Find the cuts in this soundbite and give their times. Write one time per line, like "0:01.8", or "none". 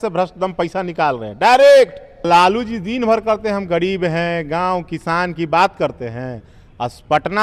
0:02.3